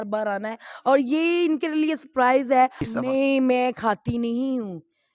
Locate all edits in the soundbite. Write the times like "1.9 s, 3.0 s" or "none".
2.9 s